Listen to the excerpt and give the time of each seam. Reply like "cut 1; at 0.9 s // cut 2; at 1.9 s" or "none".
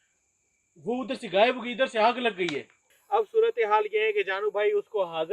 cut 1; at 2.9 s